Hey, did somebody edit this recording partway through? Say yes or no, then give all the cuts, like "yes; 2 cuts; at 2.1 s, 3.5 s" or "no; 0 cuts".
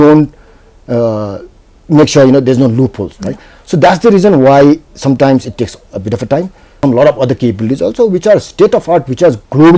yes; 1 cut; at 6.8 s